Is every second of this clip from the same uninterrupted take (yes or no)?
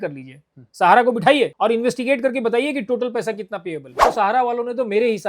no